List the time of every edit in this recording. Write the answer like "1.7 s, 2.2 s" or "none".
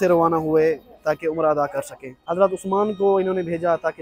2.2 s

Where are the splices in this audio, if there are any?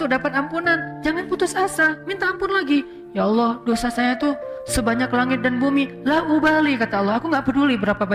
none

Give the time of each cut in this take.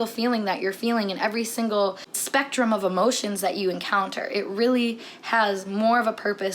2.1 s

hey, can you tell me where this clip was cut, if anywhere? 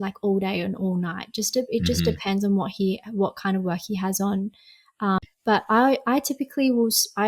5.2 s

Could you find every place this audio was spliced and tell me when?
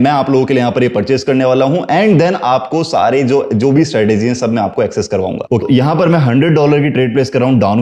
5.6 s

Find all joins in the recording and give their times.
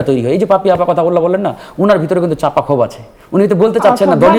none

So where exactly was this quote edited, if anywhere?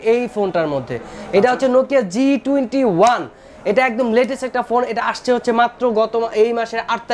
none

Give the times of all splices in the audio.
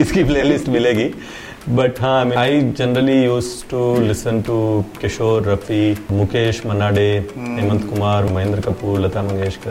2.3 s, 6.1 s, 8.3 s

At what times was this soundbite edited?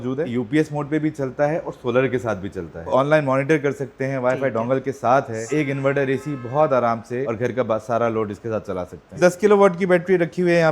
2.9 s, 5.5 s, 9.2 s

